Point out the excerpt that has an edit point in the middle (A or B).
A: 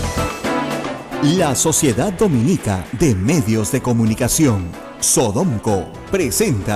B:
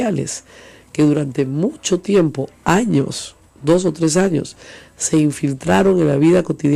A